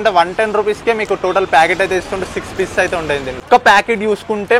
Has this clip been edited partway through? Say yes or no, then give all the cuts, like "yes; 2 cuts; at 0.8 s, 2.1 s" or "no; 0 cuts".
yes; 1 cut; at 3.4 s